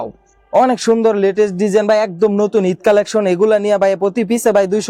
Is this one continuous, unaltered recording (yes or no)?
yes